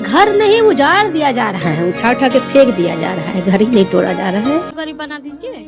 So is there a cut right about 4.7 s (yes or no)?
yes